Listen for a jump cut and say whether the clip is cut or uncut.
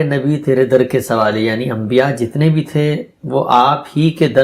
uncut